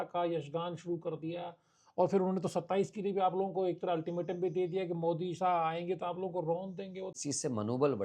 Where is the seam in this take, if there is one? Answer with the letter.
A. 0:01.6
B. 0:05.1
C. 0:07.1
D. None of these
C